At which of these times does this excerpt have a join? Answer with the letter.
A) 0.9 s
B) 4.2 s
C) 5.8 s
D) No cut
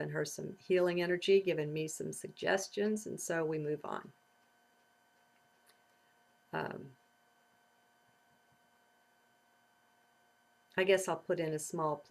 A